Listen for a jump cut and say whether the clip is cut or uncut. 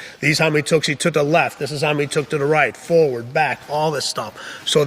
cut